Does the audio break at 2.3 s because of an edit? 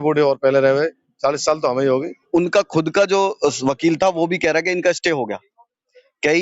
yes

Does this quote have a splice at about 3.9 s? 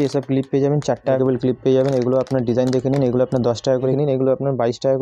yes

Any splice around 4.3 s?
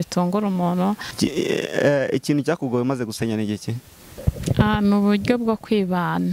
no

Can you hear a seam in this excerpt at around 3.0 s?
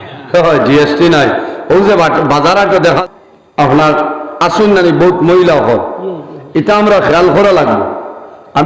yes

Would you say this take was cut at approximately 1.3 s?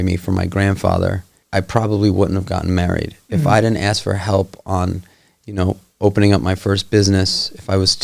yes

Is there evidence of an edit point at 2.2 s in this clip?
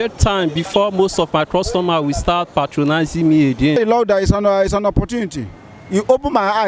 no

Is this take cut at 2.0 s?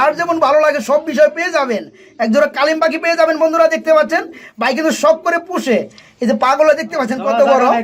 no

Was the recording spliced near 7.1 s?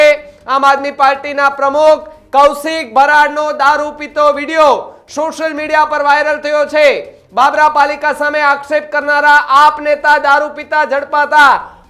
no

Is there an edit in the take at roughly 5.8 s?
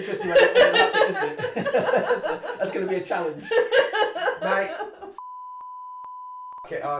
no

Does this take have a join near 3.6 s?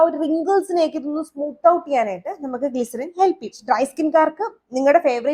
yes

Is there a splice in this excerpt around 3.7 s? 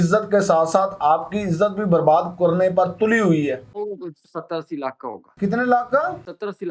yes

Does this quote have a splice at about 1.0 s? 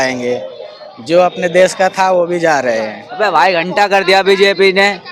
no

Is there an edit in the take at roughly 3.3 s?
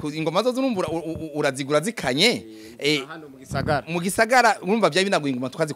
no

